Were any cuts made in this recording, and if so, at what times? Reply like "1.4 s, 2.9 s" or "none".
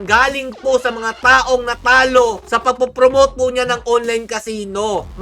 none